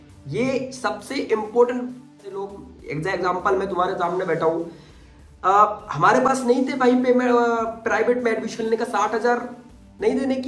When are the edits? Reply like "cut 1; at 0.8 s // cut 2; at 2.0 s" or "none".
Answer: cut 1; at 2.4 s